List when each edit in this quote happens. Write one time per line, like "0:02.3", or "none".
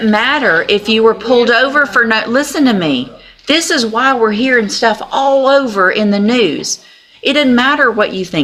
none